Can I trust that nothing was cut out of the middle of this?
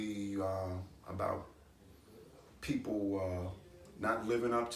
yes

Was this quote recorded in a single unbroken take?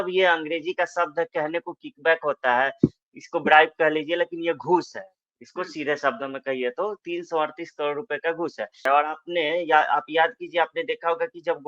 no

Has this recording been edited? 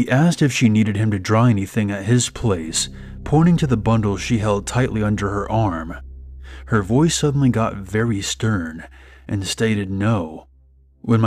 no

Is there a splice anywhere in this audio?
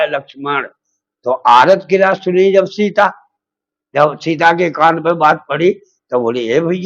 no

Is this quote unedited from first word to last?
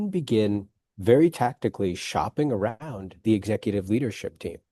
yes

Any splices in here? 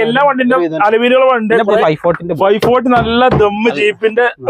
yes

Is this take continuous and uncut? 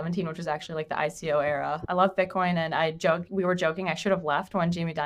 no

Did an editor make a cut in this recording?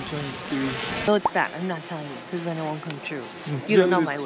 yes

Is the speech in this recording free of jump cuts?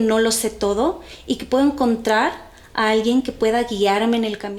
yes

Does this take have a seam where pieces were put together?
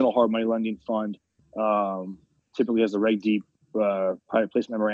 no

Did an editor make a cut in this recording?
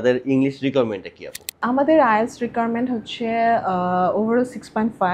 yes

